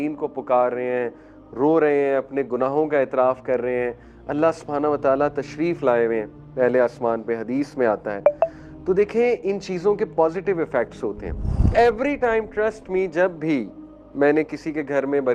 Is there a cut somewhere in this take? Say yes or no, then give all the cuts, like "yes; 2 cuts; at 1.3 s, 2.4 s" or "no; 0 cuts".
yes; 1 cut; at 11.7 s